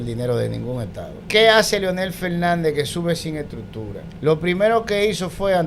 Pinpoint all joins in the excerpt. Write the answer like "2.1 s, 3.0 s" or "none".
1.1 s, 4.0 s